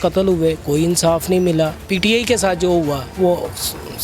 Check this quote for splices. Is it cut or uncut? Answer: cut